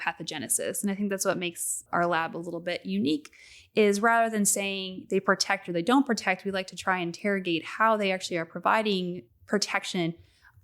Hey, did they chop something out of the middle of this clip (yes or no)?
yes